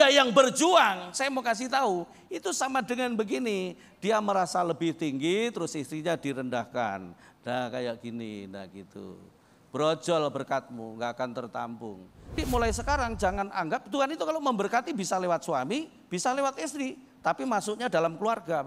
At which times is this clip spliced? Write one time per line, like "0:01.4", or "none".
0:12.4